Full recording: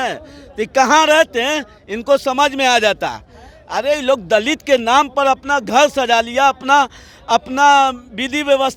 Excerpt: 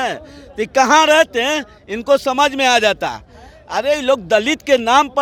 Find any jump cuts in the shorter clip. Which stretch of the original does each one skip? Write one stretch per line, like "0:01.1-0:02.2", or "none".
none